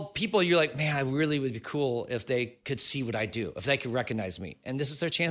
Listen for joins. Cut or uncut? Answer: uncut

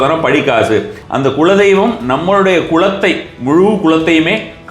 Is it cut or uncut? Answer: cut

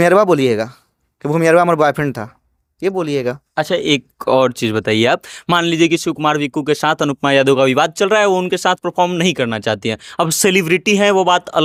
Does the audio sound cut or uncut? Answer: uncut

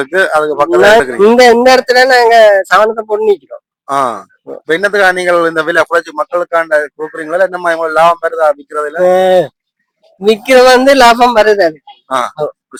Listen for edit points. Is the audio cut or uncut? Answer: uncut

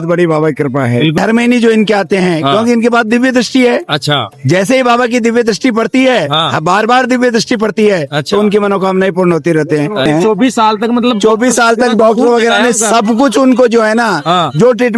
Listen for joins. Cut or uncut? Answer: cut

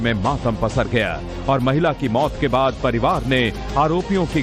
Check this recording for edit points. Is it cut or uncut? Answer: uncut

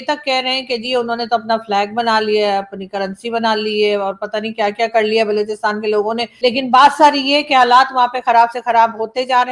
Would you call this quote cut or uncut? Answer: cut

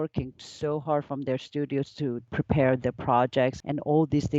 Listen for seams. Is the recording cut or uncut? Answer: cut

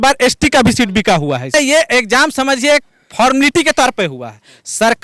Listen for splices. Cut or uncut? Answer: cut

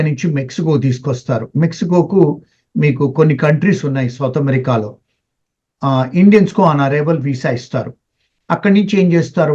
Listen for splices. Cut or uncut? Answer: uncut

